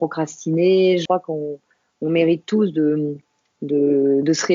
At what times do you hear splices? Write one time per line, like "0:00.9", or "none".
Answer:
0:01.0